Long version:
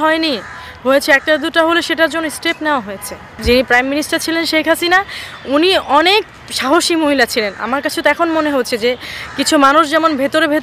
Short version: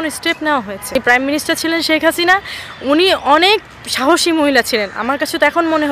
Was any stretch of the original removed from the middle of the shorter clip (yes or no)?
yes